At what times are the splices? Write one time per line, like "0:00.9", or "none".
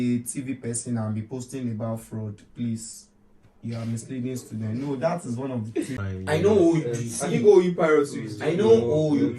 0:06.0